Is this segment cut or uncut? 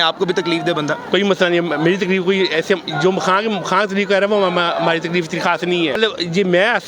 cut